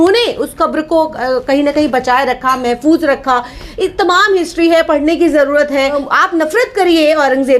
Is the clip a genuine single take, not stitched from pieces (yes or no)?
no